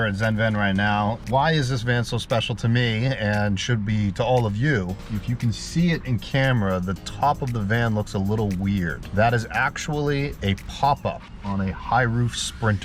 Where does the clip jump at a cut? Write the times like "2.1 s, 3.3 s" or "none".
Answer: 1.2 s, 9.0 s